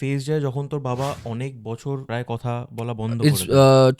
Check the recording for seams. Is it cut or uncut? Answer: cut